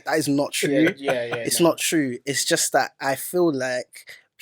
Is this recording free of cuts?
yes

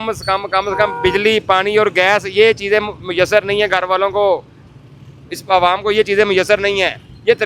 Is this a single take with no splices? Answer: yes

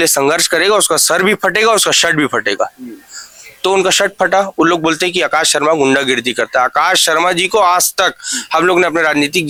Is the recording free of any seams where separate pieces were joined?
yes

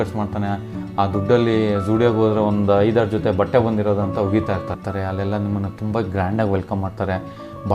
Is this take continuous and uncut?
no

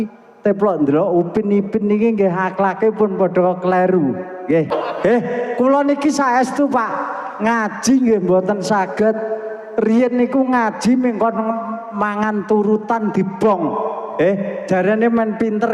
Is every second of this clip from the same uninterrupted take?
no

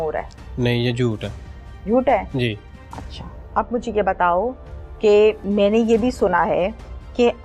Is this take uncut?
yes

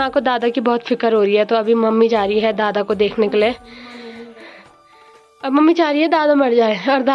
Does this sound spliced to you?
no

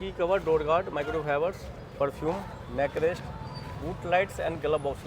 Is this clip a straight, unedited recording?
yes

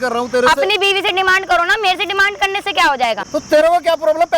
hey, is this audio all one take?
no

